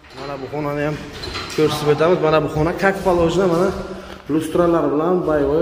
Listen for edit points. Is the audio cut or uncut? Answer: uncut